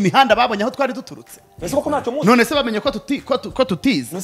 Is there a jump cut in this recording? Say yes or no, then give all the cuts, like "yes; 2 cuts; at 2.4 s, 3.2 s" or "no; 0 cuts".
no; 0 cuts